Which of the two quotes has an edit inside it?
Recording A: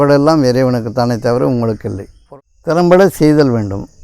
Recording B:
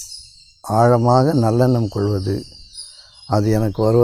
A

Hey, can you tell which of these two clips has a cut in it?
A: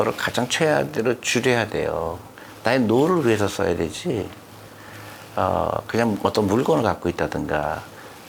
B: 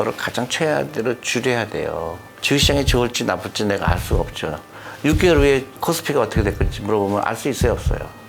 B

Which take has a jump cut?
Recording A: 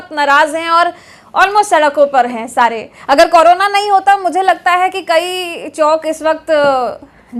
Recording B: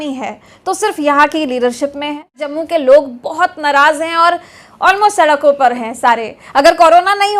B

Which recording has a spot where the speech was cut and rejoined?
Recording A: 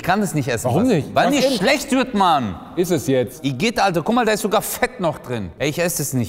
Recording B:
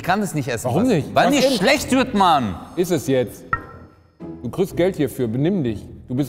A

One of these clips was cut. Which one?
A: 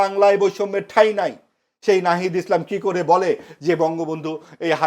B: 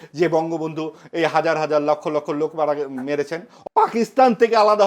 B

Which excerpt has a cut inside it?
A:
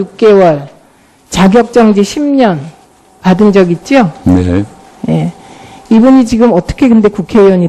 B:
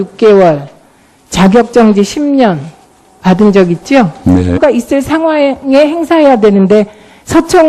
A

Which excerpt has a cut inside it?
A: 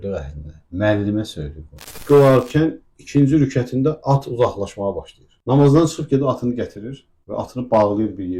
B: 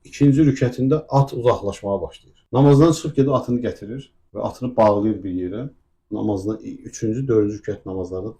A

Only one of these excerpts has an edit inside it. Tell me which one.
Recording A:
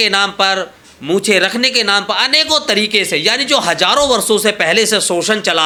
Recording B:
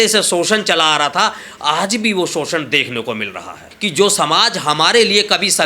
B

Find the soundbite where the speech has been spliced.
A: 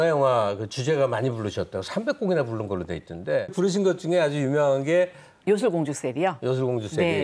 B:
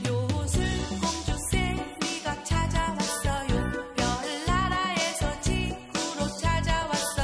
A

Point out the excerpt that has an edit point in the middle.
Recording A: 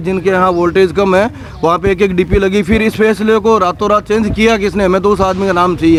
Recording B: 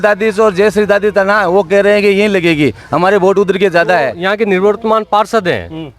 B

